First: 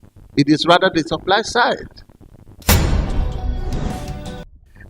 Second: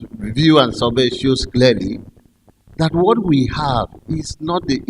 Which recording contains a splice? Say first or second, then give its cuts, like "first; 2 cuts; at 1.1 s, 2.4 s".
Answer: first; 1 cut; at 2.5 s